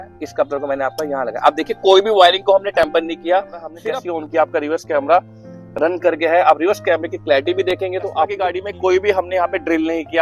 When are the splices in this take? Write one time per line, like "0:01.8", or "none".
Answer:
0:03.7
0:08.6